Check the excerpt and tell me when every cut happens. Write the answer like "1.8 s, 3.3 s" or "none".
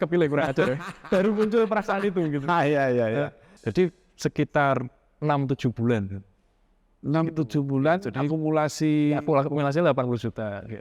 3.5 s